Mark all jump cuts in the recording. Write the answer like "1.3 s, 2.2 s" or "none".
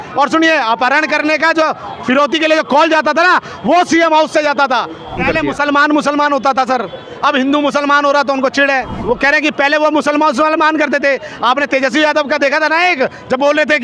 5.2 s, 8.9 s